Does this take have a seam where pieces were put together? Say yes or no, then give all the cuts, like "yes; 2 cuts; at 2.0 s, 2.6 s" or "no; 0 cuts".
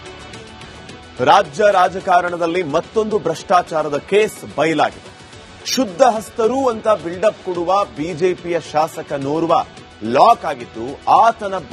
yes; 1 cut; at 1.0 s